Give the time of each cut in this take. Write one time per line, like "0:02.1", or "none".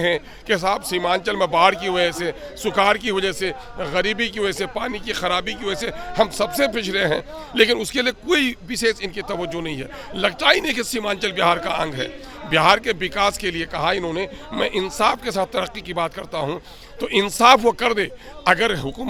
none

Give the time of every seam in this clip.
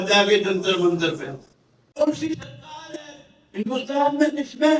0:02.0

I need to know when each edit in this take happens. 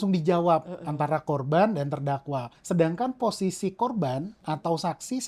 0:02.5

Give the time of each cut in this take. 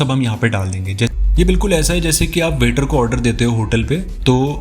0:01.1

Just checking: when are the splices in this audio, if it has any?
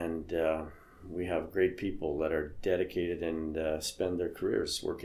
none

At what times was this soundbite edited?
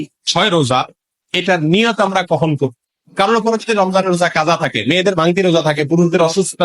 0:02.8

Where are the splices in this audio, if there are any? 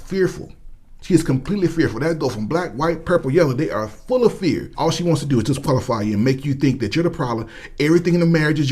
0:04.7

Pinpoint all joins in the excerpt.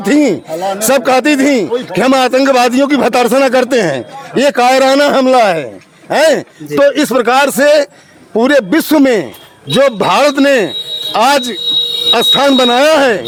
none

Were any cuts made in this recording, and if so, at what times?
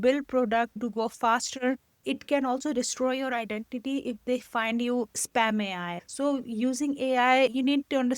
0:00.8
0:02.0
0:06.0

